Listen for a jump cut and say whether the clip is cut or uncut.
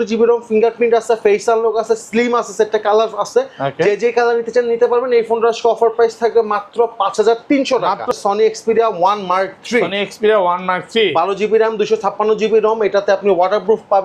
cut